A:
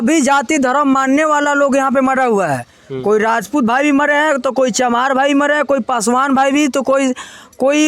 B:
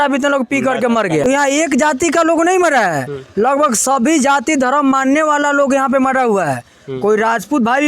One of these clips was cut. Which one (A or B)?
B